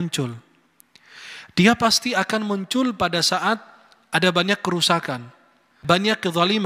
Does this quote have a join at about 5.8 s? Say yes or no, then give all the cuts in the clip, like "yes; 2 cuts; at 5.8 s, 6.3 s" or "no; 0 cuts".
yes; 1 cut; at 5.8 s